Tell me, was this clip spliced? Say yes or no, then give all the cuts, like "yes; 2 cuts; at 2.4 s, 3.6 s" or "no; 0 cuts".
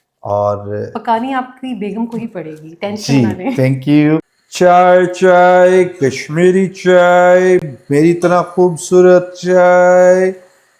yes; 1 cut; at 4.4 s